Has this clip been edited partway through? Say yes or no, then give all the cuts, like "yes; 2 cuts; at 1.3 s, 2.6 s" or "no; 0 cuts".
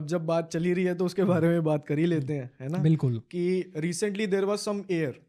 no; 0 cuts